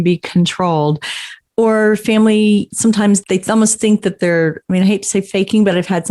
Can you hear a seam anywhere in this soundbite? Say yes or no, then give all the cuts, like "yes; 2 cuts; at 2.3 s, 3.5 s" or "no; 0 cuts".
no; 0 cuts